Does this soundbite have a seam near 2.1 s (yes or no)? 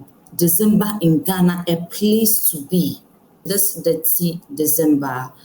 no